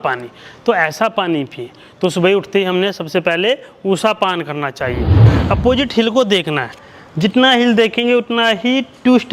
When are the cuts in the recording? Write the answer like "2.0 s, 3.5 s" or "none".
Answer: 5.2 s

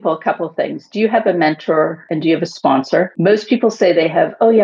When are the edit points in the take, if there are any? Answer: 2.0 s, 3.1 s

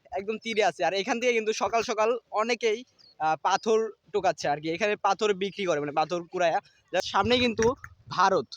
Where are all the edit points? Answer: 7.1 s

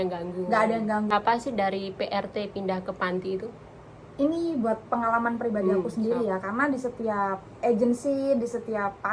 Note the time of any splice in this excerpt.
1.1 s

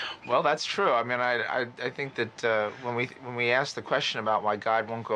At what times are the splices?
2.7 s

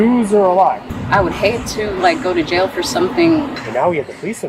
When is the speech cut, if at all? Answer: 0.9 s, 3.6 s

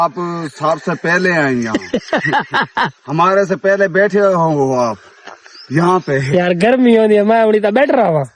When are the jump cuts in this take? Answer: none

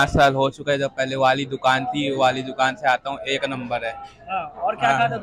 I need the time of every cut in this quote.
none

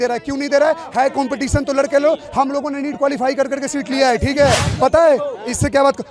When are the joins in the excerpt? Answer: 4.7 s

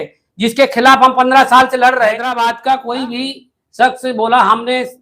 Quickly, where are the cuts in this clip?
2.3 s

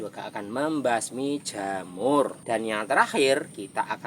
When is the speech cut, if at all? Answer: 2.4 s

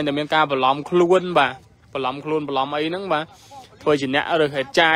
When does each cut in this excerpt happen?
none

